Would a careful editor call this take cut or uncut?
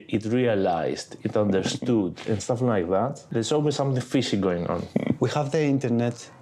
cut